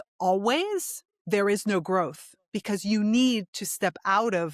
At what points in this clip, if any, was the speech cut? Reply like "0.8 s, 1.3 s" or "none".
none